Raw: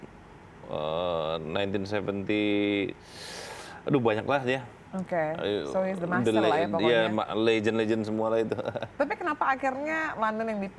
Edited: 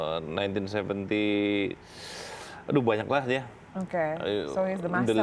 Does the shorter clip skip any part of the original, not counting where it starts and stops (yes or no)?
no